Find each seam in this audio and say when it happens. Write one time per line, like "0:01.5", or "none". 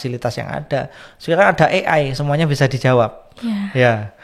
none